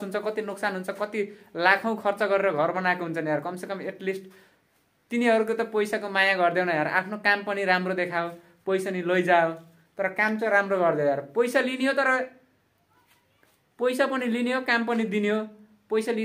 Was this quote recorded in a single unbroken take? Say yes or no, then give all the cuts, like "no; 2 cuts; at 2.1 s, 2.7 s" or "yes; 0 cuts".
yes; 0 cuts